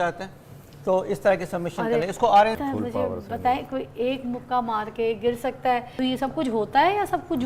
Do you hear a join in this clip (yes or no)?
yes